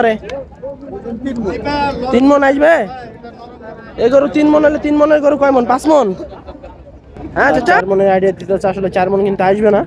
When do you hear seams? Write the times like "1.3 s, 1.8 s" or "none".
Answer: 7.8 s